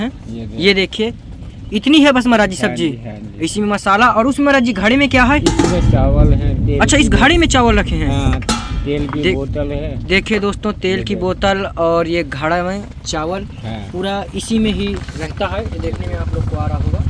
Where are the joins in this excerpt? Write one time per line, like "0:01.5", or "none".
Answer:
none